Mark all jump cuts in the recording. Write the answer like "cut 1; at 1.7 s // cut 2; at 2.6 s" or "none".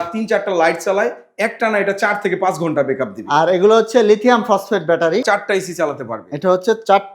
cut 1; at 5.2 s